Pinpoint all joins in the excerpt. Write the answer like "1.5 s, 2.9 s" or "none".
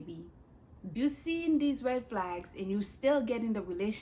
0.9 s